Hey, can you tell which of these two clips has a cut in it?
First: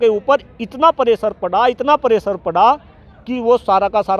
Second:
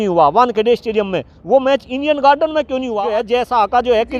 second; 1 cut; at 2.9 s

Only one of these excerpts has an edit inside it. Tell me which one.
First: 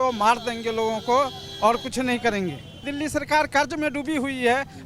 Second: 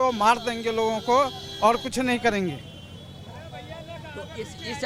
first; 1 cut; at 2.9 s

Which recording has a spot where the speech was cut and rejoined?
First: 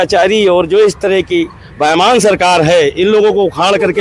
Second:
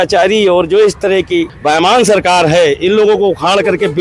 second; 1 cut; at 1.5 s

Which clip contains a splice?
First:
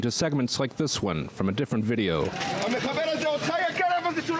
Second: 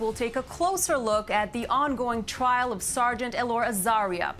first; 1 cut; at 2.4 s

